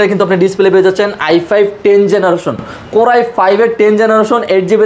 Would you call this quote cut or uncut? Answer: uncut